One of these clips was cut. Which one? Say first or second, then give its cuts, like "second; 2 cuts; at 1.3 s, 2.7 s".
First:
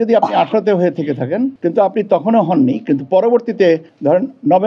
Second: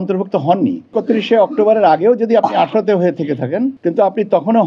second; 1 cut; at 0.9 s